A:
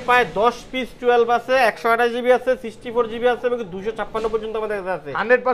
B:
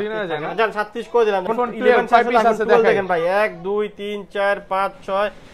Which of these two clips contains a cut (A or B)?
B